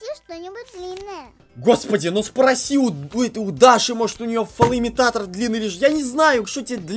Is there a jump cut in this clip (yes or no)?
yes